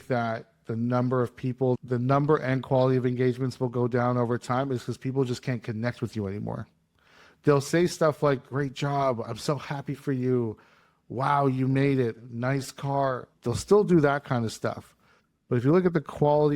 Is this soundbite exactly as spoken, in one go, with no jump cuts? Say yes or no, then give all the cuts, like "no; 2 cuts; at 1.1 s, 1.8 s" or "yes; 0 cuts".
no; 1 cut; at 1.8 s